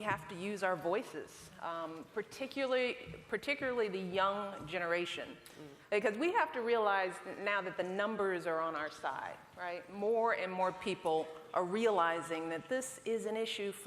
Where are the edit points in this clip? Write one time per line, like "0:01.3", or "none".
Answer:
0:04.4